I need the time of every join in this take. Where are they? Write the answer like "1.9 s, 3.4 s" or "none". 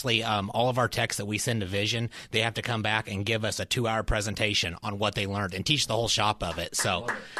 none